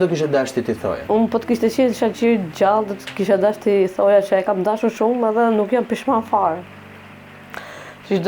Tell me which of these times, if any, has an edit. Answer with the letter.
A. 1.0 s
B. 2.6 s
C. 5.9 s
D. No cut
A